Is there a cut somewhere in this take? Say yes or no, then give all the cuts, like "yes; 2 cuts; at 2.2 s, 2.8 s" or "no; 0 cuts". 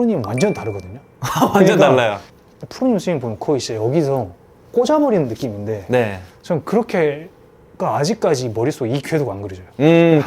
yes; 1 cut; at 2.3 s